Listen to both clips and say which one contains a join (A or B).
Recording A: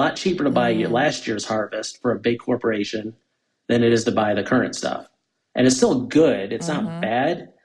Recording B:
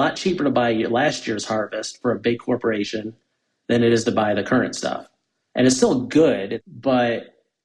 B